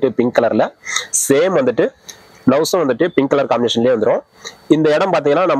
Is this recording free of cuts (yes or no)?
yes